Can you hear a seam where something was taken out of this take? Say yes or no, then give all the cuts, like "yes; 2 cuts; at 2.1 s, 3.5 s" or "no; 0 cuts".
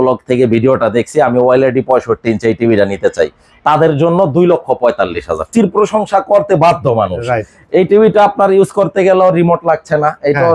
yes; 1 cut; at 5.5 s